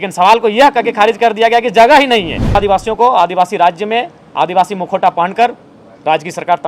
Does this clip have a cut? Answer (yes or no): yes